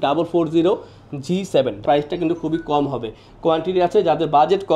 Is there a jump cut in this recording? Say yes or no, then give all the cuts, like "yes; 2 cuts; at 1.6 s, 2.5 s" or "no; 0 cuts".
yes; 1 cut; at 1.8 s